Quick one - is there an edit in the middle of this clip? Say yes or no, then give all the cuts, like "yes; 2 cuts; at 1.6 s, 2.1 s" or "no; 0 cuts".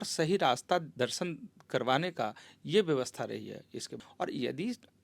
yes; 1 cut; at 3.9 s